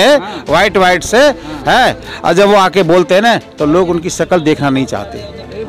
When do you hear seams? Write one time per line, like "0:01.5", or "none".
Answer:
none